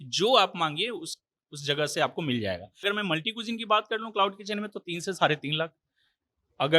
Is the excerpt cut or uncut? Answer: cut